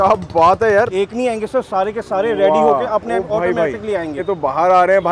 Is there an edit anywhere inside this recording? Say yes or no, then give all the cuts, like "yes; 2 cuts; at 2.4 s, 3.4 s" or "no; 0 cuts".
yes; 2 cuts; at 0.9 s, 4.1 s